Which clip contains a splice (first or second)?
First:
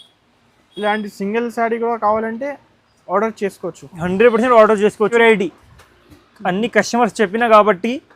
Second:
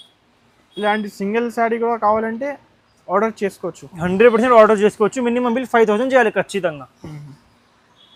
first